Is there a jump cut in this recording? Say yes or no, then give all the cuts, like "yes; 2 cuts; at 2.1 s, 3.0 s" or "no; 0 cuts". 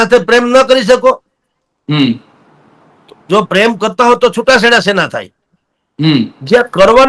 no; 0 cuts